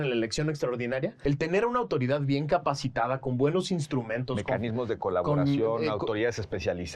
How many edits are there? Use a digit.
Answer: 1